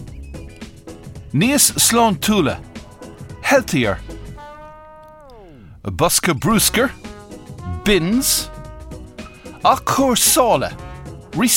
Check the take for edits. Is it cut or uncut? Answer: uncut